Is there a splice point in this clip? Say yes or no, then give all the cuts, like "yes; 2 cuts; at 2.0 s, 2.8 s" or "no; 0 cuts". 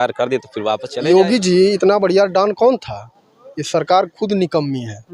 yes; 1 cut; at 0.9 s